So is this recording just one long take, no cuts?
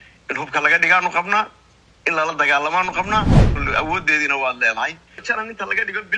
no; 2 cuts; at 3.5 s, 5.1 s

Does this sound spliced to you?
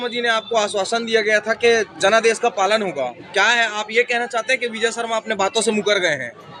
no; 0 cuts

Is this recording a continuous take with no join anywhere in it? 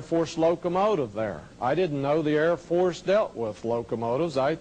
no; 1 cut; at 1.1 s

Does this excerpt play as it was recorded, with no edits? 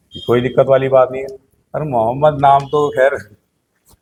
yes; 0 cuts

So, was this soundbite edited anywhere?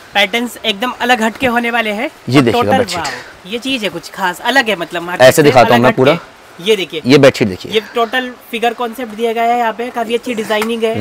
no; 0 cuts

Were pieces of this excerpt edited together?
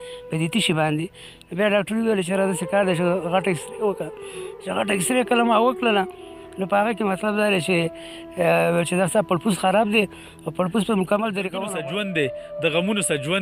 yes; 1 cut; at 11.6 s

